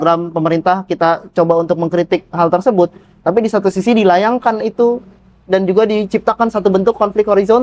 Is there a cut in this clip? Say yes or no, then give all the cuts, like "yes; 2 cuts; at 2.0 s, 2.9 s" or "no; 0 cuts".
no; 0 cuts